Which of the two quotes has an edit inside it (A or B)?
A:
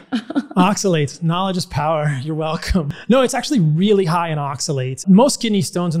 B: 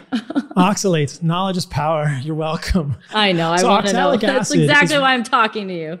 A